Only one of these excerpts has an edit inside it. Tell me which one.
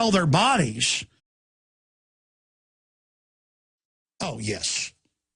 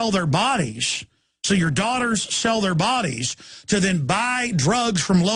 second; 1 cut; at 1.3 s

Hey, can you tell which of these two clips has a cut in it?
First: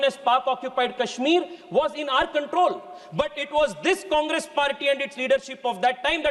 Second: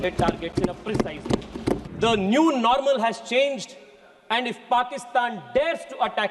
second; 1 cut; at 1.9 s

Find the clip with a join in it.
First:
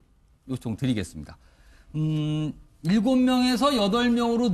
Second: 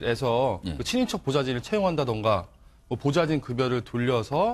first; 1 cut; at 1.2 s

